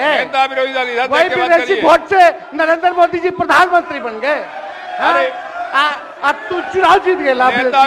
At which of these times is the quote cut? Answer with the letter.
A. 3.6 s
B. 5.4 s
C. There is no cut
C